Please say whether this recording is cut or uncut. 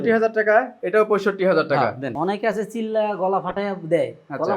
cut